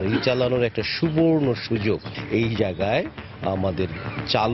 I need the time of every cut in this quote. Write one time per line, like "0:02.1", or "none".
0:02.1

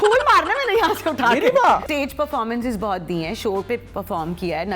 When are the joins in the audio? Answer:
0:01.8

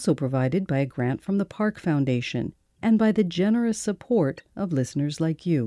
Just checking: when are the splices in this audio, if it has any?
0:02.6

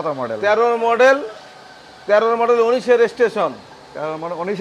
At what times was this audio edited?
none

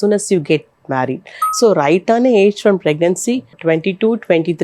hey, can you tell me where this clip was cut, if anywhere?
0:01.4
0:03.5

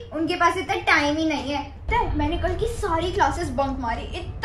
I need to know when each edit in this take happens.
0:01.9

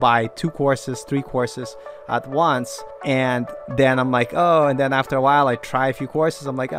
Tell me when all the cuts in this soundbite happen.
0:03.1

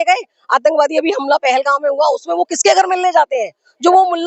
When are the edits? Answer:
none

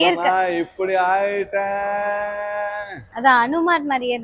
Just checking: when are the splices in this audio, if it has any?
none

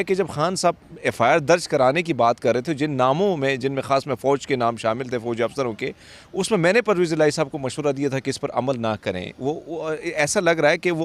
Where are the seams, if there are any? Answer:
none

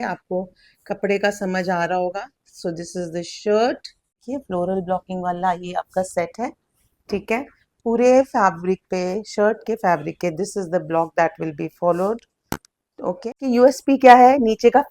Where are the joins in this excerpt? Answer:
0:04.2
0:13.4

